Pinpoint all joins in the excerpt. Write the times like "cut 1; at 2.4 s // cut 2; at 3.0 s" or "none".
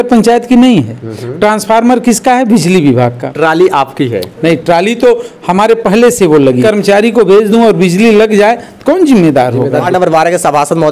cut 1; at 3.2 s // cut 2; at 6.6 s // cut 3; at 9.9 s